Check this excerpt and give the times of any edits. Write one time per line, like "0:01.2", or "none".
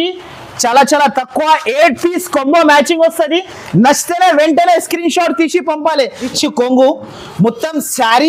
0:06.3